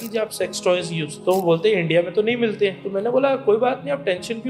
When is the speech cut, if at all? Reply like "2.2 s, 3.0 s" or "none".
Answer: 1.1 s, 2.8 s